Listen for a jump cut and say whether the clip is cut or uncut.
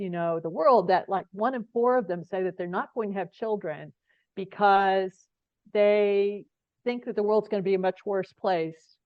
uncut